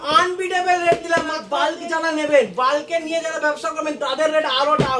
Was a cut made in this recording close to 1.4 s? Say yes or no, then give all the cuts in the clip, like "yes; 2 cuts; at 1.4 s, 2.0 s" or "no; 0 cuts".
yes; 1 cut; at 1.4 s